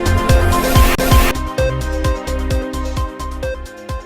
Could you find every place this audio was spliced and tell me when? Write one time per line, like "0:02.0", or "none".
0:00.9